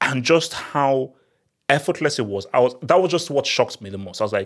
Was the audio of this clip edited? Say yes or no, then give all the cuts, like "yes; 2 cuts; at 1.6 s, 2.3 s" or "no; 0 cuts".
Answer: no; 0 cuts